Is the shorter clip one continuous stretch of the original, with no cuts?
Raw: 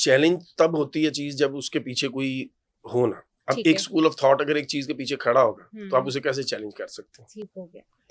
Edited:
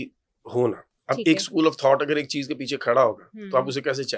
yes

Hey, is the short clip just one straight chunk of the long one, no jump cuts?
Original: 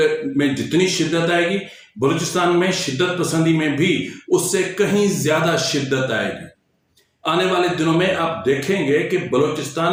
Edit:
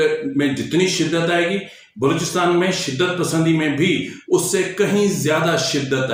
yes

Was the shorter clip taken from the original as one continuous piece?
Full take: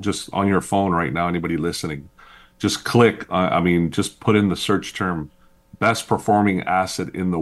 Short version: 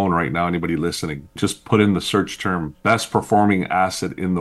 no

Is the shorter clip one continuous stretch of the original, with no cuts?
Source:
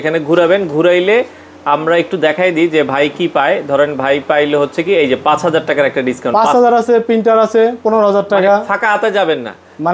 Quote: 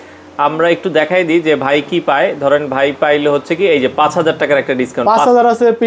yes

